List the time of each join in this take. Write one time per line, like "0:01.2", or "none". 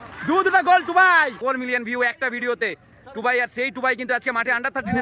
0:01.4